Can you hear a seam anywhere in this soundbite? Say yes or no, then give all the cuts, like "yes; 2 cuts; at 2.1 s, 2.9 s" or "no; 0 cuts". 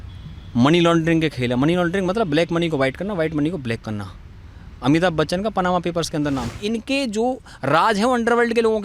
yes; 1 cut; at 6.6 s